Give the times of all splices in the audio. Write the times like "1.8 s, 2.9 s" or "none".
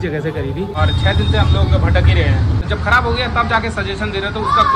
0.8 s, 2.6 s